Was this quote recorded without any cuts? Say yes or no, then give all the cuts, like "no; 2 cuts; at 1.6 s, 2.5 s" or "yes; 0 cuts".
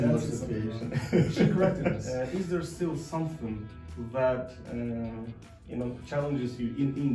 no; 1 cut; at 2.0 s